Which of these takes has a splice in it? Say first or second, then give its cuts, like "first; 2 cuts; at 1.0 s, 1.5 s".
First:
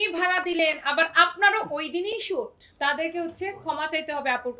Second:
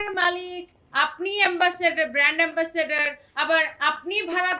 first; 1 cut; at 2.7 s